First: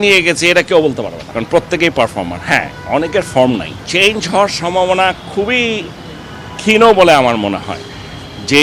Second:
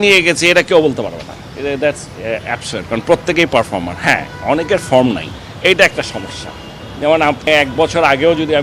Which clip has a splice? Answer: first; 2 cuts; at 1.2 s, 3.8 s

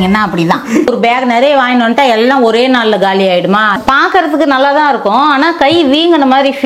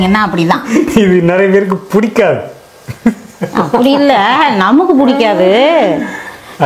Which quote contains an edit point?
first; 2 cuts; at 0.9 s, 3.7 s

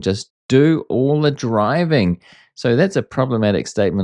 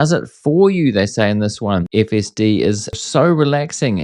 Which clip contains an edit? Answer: second; 2 cuts; at 1.9 s, 3.0 s

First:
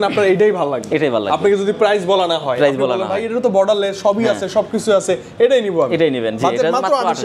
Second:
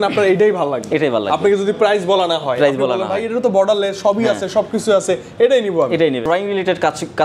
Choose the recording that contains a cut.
second; 1 cut; at 6.2 s

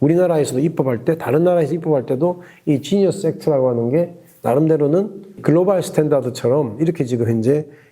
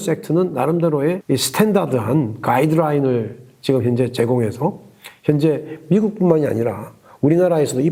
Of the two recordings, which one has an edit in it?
first; 1 cut; at 5.4 s

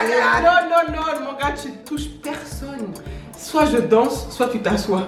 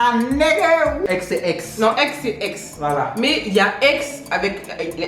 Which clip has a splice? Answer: second; 1 cut; at 1.1 s

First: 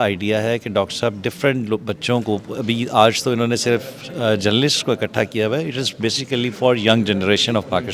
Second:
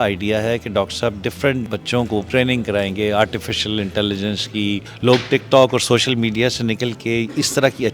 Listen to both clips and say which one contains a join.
second; 2 cuts; at 2.0 s, 4.9 s

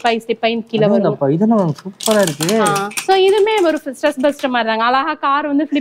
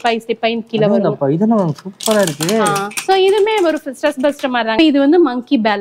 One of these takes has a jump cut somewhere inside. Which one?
second; 1 cut; at 4.7 s

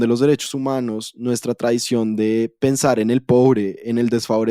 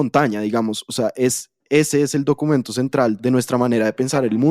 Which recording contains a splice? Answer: second; 1 cut; at 3.2 s

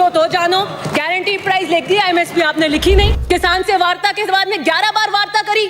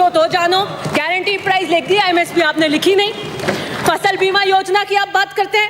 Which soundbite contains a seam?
first; 1 cut; at 3.2 s

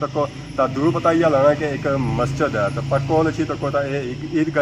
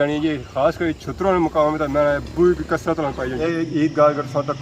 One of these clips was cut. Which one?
second; 1 cut; at 3.3 s

